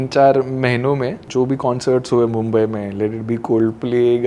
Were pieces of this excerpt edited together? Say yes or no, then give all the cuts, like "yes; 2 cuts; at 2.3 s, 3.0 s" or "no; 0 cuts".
no; 0 cuts